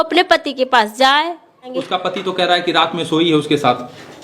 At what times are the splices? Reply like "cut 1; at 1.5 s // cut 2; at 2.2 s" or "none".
cut 1; at 1.7 s